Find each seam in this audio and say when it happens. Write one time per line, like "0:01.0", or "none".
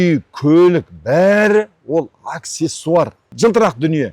0:03.2